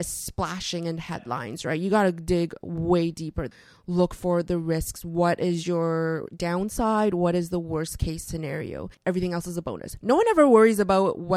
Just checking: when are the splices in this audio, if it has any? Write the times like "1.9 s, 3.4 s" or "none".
3.6 s, 8.9 s